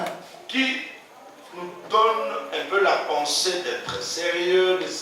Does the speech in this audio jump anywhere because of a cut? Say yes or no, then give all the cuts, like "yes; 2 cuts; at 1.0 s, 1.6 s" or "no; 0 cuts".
no; 0 cuts